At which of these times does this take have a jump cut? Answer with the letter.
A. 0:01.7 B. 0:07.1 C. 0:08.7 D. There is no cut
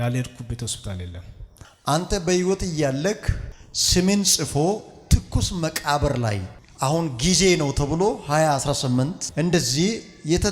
A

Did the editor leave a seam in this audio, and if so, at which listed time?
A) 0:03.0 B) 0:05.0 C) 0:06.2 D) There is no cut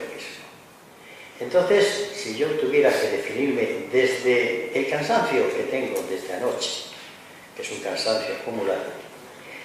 C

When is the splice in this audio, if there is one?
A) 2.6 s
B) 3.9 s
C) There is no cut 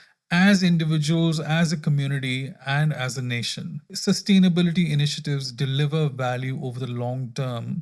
B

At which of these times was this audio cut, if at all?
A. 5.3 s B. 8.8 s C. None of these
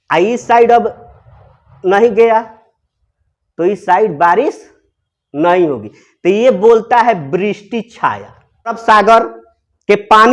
B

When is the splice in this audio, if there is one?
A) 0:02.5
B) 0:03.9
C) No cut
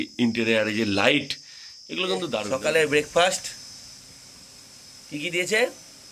A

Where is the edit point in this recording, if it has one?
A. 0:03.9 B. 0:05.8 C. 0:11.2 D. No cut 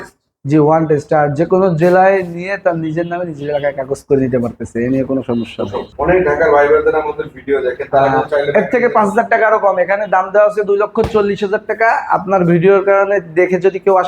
B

